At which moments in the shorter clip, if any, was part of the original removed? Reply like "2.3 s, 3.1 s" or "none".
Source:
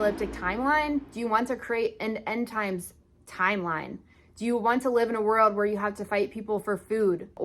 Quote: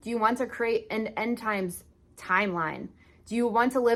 none